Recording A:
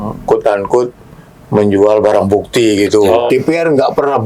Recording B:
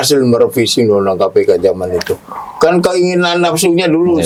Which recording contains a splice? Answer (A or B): A